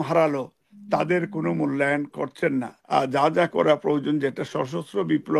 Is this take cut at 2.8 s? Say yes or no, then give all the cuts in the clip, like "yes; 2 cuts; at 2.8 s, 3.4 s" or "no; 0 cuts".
yes; 1 cut; at 2.8 s